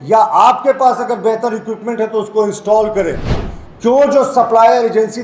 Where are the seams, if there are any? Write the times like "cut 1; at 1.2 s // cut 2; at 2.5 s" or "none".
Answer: cut 1; at 3.5 s